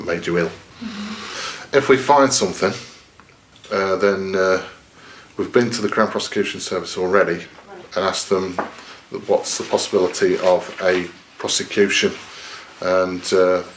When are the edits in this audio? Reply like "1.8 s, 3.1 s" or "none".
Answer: none

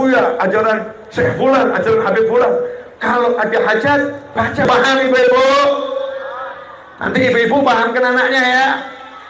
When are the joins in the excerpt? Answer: 4.6 s

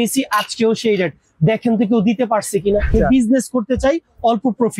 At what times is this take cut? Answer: 2.9 s

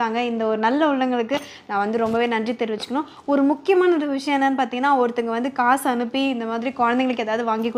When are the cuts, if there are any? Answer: none

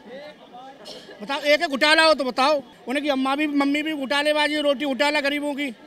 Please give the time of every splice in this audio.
2.8 s

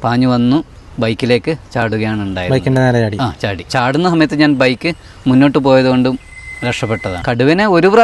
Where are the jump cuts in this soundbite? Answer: 3.7 s, 7.1 s

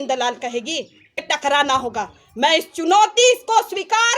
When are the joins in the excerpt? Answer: 1.3 s

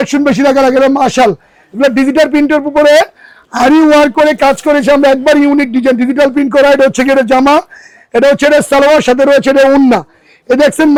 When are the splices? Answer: none

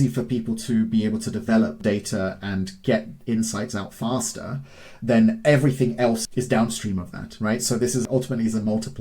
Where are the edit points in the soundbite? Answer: 1.8 s, 6.2 s, 8.0 s

